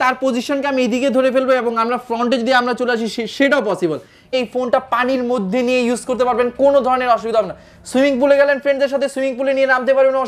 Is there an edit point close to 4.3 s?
yes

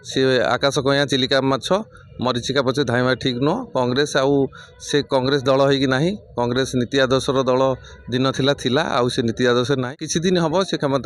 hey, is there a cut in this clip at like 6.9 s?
no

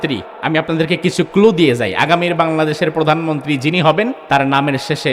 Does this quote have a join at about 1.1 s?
no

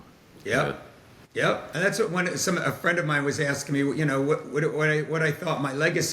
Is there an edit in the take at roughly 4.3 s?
no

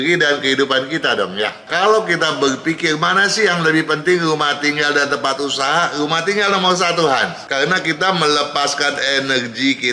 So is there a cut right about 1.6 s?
yes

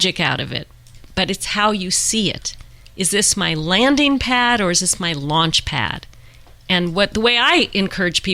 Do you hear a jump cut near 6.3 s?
no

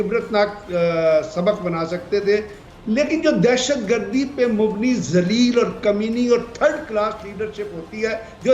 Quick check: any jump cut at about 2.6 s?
yes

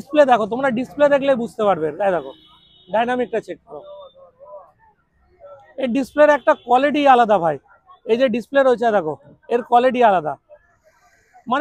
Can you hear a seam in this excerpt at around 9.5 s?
no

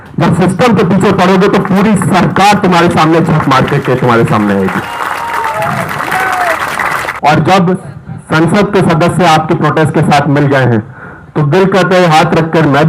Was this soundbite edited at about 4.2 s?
no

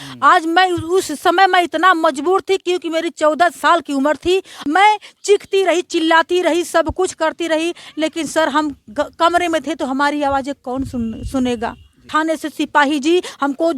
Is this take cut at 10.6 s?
no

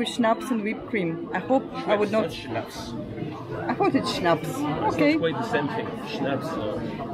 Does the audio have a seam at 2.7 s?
no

